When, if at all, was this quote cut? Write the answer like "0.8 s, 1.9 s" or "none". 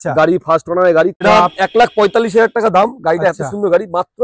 1.2 s